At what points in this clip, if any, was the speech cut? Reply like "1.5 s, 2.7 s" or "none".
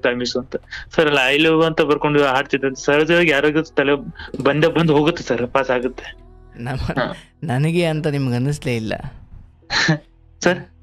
none